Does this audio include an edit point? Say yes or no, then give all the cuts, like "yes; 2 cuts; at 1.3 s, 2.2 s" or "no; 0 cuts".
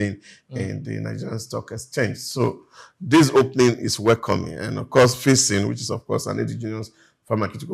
no; 0 cuts